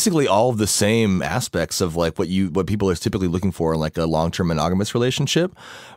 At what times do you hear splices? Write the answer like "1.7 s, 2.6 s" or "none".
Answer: none